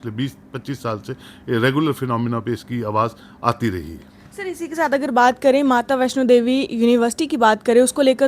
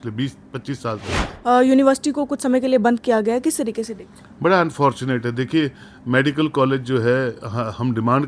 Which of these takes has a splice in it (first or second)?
second